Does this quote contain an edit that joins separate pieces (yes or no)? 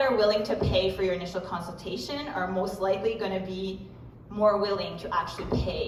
no